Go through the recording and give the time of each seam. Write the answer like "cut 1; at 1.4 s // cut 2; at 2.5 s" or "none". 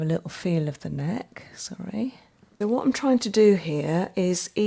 cut 1; at 2.5 s

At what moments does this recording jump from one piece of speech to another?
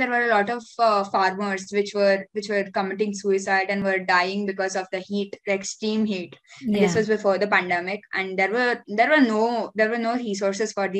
none

